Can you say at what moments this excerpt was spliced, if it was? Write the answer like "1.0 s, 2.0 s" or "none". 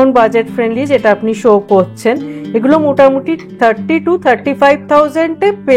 none